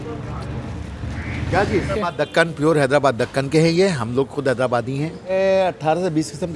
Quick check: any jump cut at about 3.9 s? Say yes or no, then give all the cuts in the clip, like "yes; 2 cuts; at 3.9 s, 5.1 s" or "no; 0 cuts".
no; 2 cuts; at 1.9 s, 5.3 s